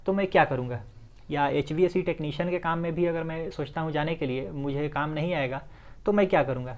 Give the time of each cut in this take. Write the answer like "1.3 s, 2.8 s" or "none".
none